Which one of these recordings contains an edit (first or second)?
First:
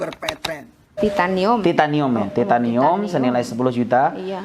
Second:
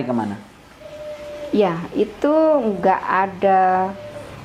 first